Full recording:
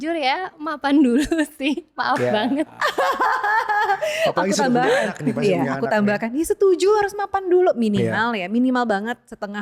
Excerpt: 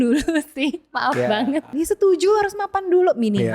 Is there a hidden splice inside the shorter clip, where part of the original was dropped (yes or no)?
yes